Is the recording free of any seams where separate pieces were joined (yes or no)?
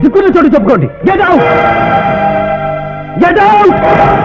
yes